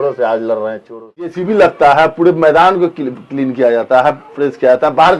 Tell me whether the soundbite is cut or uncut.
cut